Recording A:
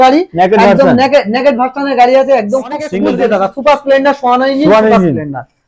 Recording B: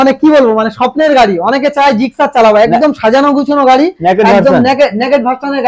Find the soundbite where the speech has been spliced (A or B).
A